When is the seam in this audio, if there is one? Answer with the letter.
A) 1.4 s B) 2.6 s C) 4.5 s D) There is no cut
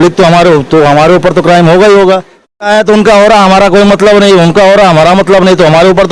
B